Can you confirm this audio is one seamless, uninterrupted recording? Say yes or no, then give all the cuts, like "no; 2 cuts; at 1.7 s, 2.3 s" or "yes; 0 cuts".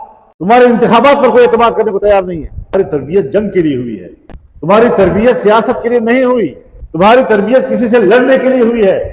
no; 1 cut; at 2.6 s